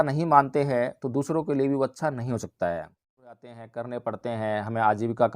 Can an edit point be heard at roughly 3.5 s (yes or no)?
yes